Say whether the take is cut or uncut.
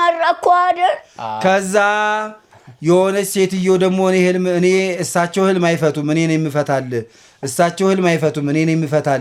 uncut